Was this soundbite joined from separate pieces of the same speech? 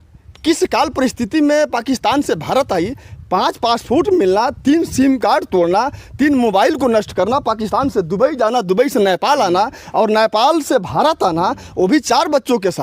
no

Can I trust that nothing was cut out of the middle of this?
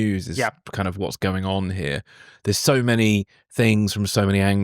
yes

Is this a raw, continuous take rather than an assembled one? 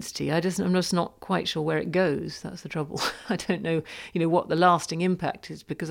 yes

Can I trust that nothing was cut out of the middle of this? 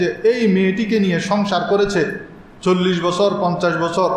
yes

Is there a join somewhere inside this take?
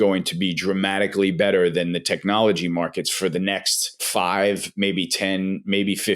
yes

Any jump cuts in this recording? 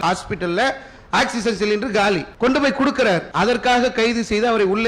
yes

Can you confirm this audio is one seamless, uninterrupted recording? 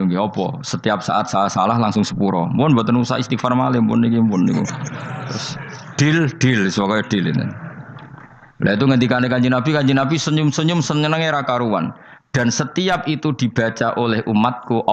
yes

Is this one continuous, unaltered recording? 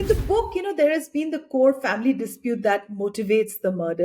yes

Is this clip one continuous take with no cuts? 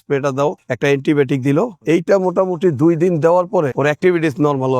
no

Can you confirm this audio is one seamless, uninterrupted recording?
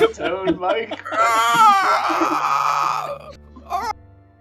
no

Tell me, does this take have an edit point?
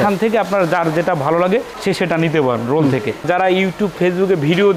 yes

